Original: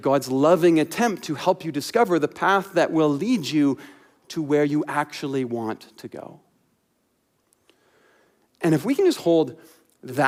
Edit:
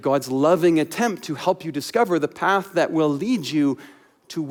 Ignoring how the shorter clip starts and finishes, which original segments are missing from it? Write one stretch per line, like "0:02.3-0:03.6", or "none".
none